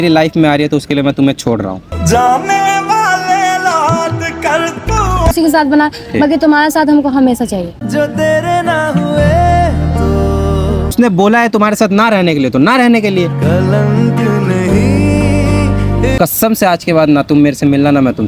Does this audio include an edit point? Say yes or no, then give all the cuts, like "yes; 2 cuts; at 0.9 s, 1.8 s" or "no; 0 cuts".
yes; 3 cuts; at 5.3 s, 10.9 s, 16.1 s